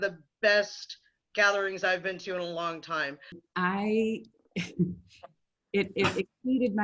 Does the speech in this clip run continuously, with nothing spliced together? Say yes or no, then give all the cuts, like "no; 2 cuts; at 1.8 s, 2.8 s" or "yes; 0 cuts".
no; 1 cut; at 3.3 s